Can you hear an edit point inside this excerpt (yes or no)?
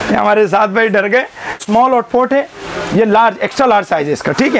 yes